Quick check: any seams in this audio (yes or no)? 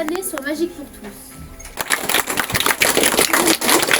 yes